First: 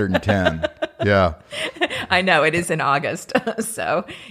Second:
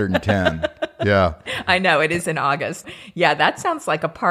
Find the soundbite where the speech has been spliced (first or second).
second